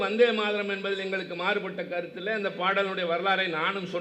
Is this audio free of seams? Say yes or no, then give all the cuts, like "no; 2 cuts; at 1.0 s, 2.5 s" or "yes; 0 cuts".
yes; 0 cuts